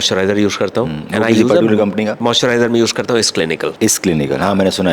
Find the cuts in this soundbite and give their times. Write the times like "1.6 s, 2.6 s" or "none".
none